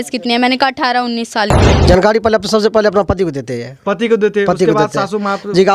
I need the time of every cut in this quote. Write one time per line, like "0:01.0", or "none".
0:01.7